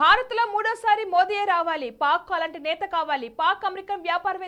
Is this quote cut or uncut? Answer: uncut